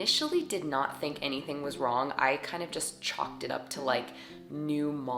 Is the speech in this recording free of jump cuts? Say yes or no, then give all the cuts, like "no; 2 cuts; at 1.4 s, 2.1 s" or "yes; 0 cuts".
yes; 0 cuts